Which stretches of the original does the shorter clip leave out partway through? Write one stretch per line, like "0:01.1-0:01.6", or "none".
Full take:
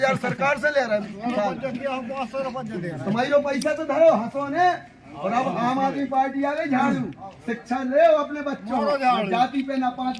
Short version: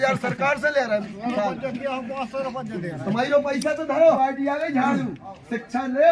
0:04.2-0:06.1